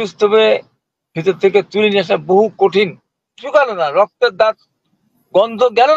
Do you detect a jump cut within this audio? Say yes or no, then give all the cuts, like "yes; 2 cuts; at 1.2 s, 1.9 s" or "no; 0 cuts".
yes; 1 cut; at 3.3 s